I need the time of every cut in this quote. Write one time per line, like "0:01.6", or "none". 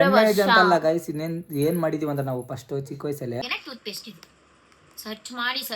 0:03.4